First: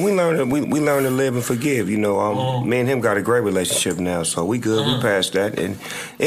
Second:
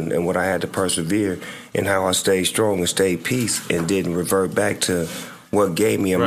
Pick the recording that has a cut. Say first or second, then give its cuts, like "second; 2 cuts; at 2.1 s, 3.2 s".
first; 1 cut; at 4.0 s